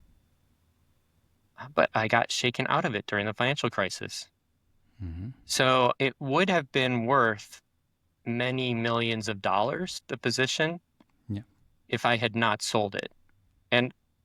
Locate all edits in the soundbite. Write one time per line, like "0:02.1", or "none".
0:06.0
0:10.0